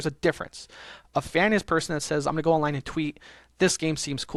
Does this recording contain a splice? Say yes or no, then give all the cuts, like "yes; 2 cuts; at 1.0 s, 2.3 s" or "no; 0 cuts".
no; 0 cuts